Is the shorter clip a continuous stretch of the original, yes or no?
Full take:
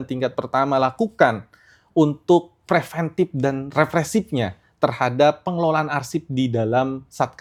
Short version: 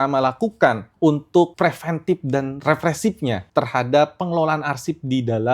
no